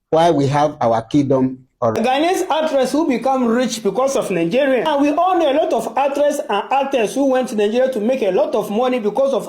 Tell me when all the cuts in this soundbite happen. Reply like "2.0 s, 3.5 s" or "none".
1.9 s